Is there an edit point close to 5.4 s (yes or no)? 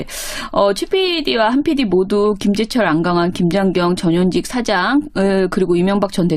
no